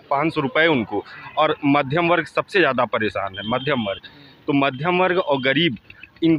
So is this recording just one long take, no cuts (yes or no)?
yes